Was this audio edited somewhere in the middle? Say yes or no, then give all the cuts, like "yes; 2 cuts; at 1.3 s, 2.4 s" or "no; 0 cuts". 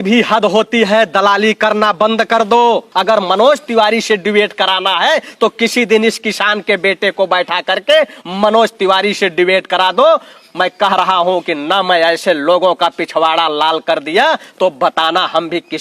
yes; 1 cut; at 2.9 s